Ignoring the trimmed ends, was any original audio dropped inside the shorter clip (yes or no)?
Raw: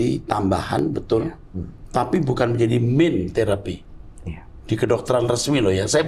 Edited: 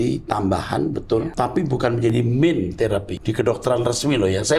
yes